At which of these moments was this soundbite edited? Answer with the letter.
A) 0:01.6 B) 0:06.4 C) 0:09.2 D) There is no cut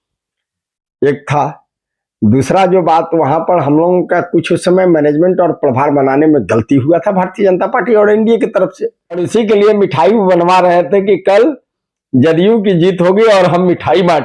C